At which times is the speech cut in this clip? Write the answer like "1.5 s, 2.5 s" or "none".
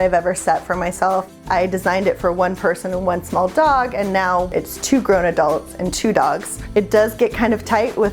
1.3 s, 4.5 s, 6.5 s